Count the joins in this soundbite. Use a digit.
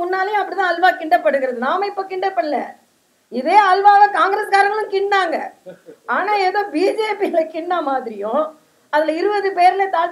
0